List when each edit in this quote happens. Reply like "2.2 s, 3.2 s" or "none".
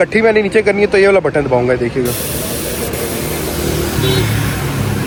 none